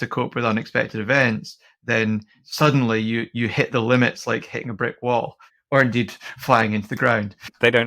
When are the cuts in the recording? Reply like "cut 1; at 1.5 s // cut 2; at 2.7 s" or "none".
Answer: cut 1; at 2.4 s